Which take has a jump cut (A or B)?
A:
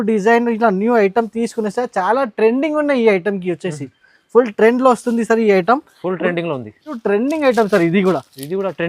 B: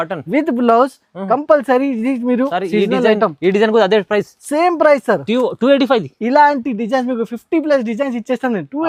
A